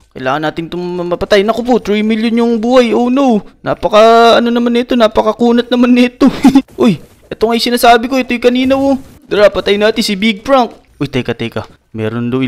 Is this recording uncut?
no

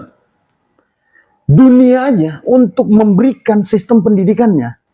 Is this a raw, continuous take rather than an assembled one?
yes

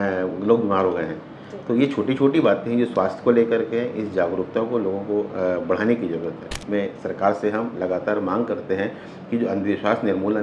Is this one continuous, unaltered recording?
no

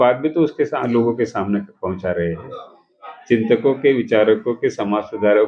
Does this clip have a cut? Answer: no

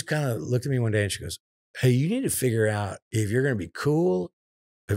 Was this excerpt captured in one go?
no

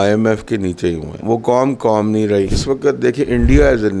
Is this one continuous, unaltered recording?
no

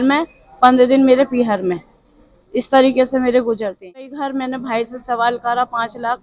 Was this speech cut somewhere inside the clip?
yes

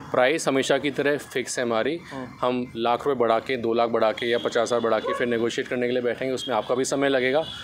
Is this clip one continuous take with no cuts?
yes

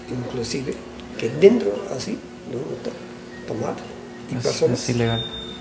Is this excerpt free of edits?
yes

